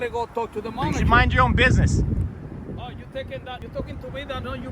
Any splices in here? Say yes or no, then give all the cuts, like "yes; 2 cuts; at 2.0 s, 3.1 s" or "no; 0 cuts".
yes; 2 cuts; at 0.9 s, 3.6 s